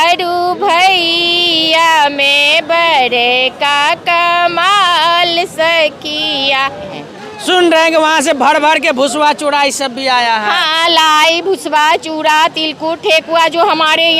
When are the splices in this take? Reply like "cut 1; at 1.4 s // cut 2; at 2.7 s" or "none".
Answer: cut 1; at 6.9 s